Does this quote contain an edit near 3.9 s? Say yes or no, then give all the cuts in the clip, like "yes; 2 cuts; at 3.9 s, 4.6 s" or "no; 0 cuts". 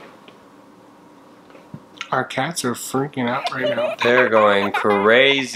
no; 1 cut; at 1.9 s